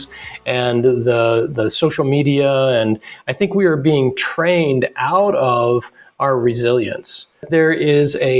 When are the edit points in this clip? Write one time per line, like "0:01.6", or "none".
0:07.5